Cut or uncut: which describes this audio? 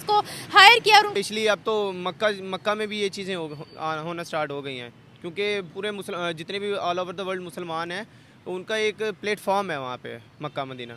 cut